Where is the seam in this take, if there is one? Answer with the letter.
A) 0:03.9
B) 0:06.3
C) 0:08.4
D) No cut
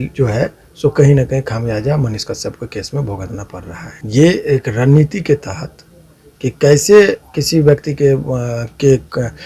A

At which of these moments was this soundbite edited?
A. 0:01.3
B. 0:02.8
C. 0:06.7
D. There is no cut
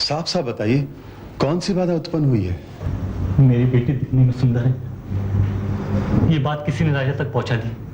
B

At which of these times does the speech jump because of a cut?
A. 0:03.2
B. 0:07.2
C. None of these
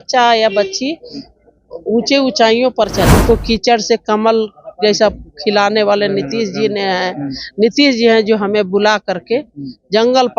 A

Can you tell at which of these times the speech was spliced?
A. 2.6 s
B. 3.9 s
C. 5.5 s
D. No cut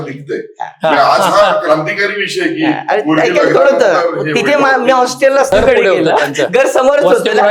C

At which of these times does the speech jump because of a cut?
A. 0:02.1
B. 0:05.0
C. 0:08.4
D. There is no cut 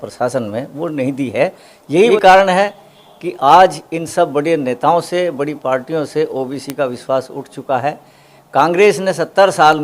A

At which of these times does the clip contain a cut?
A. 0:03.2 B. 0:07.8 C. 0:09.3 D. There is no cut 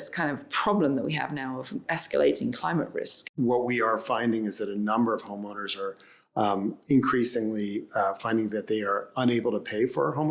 A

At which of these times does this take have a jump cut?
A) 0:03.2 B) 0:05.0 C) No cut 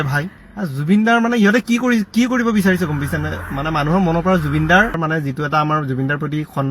B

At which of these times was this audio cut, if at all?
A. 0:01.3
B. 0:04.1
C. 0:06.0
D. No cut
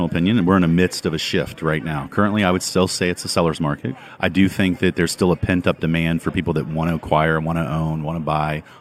B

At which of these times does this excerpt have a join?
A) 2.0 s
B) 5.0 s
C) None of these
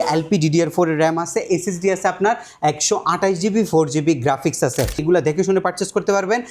B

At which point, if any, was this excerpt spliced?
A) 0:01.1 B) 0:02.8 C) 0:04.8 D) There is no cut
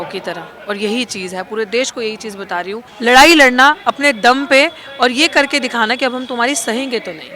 B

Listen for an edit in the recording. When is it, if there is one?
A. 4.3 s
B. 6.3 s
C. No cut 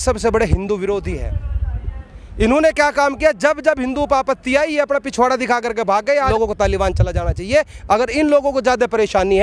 B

